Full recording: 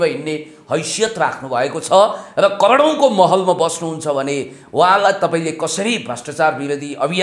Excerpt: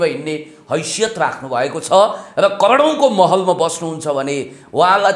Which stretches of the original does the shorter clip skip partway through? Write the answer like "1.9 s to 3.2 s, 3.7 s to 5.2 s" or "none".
none